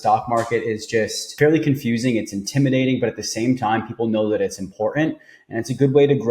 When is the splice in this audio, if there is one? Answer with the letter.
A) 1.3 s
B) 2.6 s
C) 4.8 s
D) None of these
A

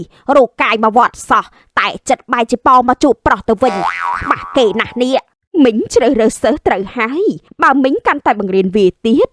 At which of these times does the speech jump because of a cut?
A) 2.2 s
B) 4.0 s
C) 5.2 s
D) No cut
C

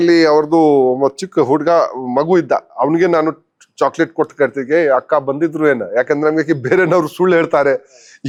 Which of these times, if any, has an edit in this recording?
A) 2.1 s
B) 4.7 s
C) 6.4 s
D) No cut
D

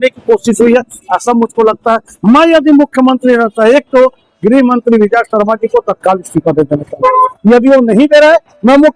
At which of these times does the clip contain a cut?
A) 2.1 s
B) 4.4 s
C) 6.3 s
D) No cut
A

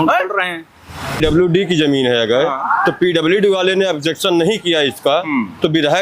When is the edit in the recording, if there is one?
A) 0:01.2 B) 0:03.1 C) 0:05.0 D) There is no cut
A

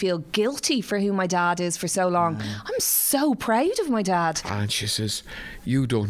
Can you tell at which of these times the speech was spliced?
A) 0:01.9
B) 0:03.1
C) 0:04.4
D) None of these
C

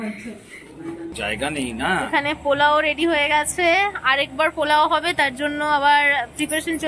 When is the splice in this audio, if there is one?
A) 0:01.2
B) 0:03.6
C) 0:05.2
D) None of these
A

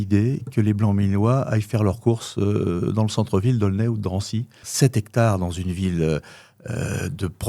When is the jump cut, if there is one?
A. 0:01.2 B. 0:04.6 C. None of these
B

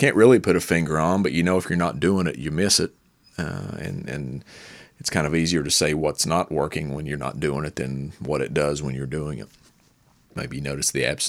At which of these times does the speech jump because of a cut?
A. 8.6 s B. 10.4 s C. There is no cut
B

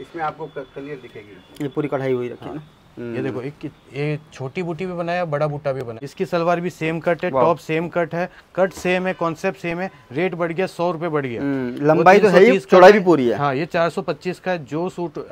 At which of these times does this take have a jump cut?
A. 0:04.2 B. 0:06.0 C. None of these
B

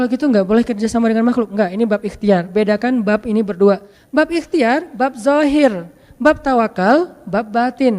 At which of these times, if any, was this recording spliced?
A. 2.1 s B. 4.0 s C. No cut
B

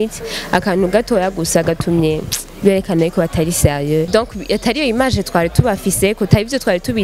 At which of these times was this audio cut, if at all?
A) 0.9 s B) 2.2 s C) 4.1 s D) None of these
C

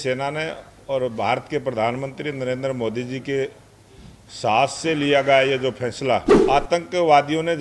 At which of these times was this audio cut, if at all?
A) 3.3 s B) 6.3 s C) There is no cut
B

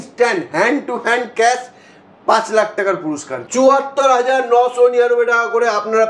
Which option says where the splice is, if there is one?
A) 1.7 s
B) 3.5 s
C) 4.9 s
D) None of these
B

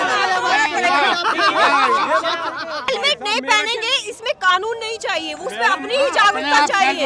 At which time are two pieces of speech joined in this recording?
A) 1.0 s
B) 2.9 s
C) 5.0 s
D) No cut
B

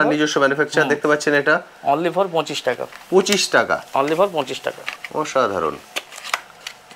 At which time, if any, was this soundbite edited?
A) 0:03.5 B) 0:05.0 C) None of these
C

